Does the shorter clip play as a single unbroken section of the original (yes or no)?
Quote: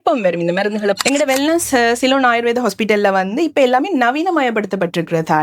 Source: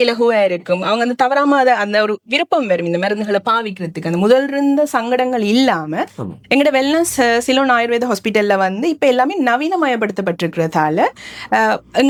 no